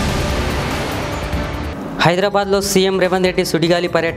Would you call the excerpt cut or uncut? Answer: uncut